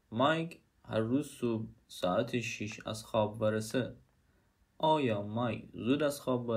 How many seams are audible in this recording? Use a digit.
1